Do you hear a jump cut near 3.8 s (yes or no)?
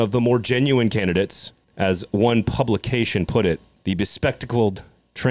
no